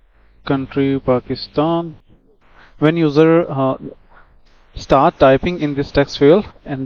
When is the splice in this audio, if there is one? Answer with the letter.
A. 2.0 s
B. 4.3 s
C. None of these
A